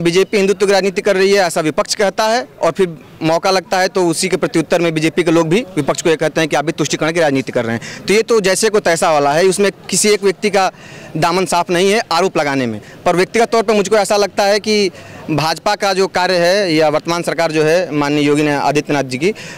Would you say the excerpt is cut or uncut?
uncut